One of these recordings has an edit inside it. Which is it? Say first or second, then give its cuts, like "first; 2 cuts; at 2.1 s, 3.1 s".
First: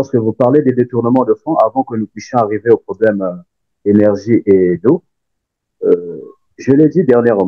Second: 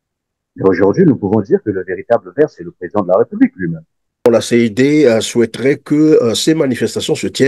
second; 1 cut; at 4.3 s